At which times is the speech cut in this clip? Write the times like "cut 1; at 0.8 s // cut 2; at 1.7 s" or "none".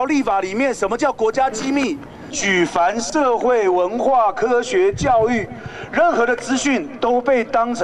cut 1; at 2.4 s